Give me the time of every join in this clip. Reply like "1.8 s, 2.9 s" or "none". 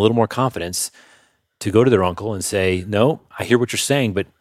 none